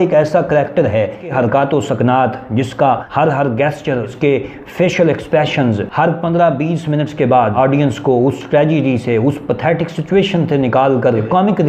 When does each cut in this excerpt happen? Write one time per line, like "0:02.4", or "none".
0:01.3
0:03.1
0:04.1
0:07.5

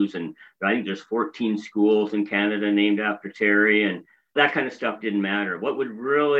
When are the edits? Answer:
0:04.3

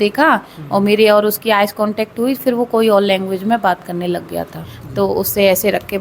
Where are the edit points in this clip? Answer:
0:04.8

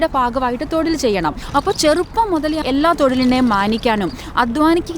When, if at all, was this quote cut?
0:01.4
0:02.6

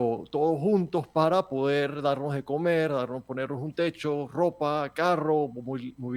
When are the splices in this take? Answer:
none

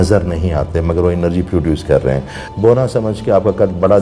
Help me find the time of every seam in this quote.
0:02.4

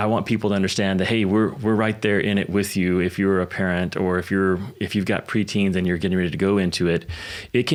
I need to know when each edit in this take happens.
none

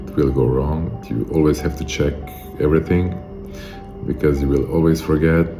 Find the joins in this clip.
none

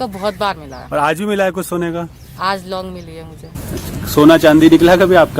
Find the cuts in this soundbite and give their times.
0:03.5

